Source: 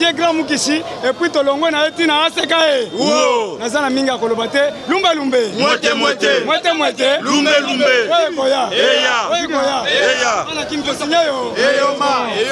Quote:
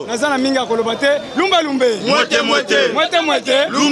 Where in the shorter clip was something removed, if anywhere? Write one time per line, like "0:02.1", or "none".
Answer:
none